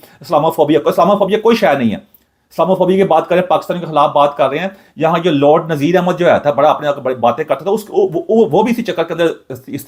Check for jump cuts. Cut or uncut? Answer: uncut